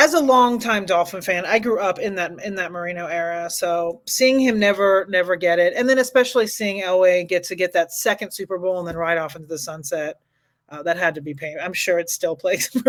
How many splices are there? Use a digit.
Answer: 0